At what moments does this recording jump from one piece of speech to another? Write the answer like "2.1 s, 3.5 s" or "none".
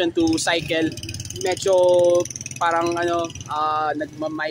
none